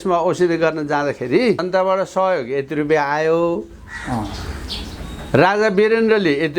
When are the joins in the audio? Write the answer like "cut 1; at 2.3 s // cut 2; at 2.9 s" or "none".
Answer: cut 1; at 1.6 s